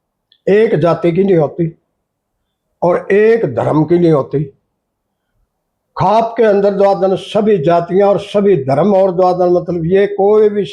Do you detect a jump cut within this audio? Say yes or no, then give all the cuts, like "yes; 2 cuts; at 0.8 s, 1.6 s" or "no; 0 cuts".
no; 0 cuts